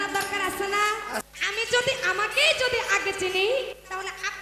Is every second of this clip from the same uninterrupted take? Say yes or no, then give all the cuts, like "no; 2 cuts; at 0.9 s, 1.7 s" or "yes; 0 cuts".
no; 2 cuts; at 1.2 s, 3.7 s